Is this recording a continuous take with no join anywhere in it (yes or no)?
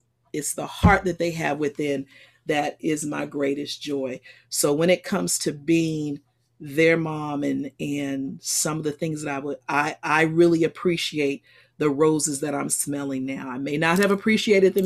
yes